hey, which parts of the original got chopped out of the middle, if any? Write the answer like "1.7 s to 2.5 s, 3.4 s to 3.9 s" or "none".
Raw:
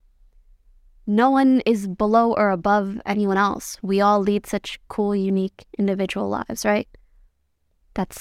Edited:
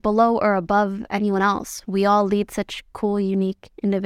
none